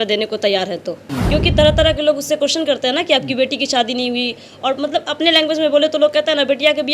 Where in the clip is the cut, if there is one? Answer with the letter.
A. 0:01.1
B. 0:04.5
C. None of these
A